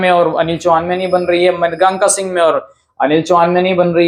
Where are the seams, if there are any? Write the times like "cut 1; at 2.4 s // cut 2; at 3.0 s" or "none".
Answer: none